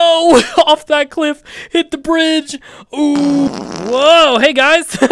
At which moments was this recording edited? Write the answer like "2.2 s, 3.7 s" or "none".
3.6 s